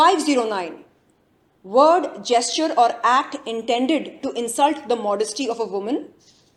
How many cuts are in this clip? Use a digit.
0